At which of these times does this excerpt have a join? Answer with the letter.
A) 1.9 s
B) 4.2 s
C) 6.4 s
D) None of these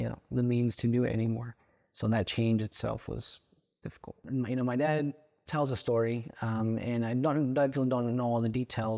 B